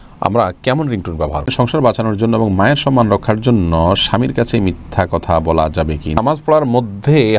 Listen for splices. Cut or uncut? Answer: cut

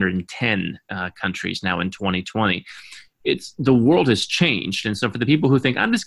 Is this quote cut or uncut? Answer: uncut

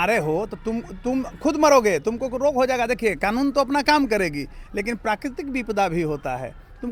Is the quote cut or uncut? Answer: uncut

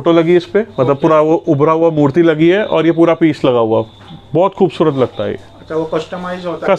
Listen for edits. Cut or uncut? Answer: uncut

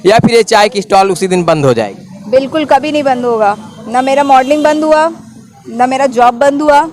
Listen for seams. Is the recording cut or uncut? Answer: uncut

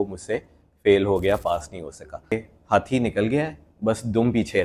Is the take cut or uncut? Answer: cut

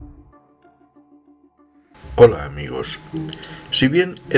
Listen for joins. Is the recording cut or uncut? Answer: cut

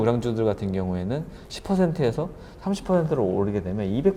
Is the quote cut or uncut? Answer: uncut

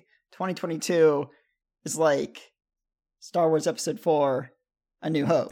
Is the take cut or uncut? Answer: uncut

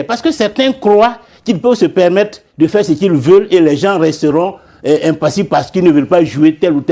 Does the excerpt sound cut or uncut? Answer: uncut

